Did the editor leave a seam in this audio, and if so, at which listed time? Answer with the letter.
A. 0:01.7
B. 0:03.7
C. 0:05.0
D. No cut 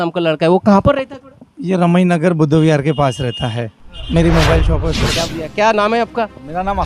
C